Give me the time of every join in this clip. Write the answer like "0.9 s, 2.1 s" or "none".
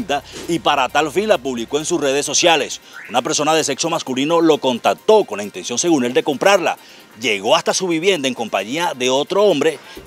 none